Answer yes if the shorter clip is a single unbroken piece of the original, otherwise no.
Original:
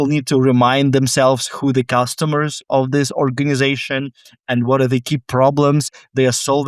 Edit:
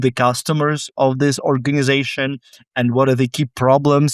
yes